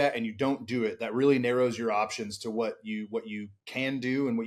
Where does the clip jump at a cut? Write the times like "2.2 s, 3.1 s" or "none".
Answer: none